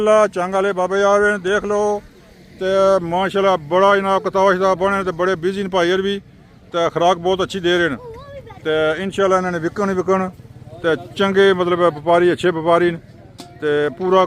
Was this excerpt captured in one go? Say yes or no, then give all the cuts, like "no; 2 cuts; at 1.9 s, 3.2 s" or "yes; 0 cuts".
yes; 0 cuts